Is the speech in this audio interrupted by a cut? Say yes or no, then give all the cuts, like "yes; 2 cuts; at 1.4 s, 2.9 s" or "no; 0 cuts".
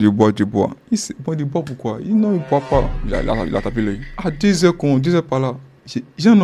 yes; 1 cut; at 3.0 s